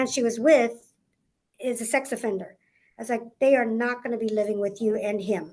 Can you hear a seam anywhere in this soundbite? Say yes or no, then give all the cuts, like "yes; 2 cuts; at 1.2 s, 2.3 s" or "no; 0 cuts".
no; 0 cuts